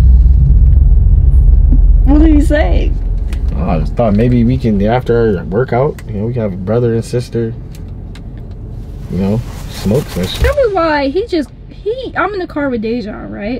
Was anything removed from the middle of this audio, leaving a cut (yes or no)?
yes